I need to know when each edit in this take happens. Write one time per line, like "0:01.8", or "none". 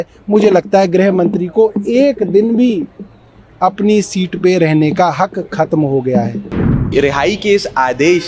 0:06.9